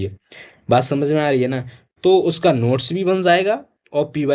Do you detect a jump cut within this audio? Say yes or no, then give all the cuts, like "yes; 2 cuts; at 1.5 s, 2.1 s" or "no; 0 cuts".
no; 0 cuts